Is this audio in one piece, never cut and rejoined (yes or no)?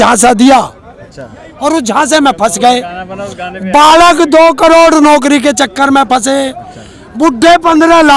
yes